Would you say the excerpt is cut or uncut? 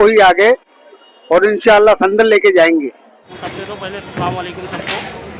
cut